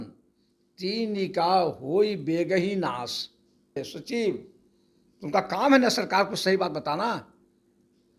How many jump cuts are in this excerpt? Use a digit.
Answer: 1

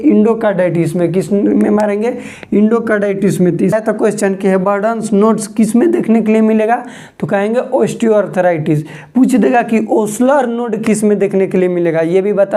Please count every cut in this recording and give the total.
1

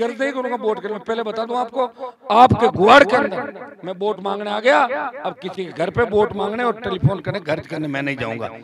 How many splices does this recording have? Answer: 0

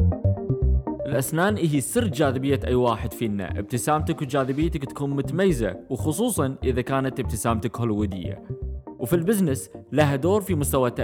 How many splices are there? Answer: 1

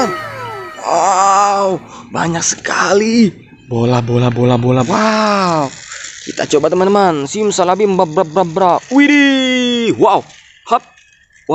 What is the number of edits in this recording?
1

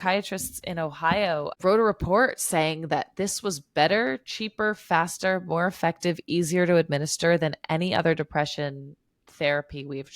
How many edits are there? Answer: 1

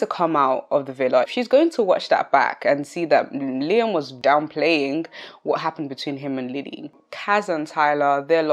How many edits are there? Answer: 3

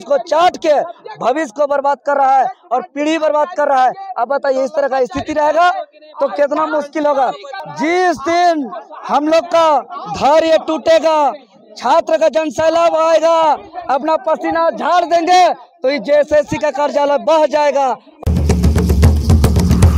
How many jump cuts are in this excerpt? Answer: 2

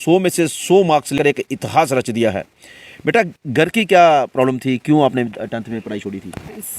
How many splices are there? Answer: 1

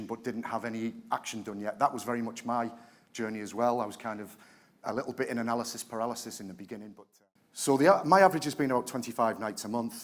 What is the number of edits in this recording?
1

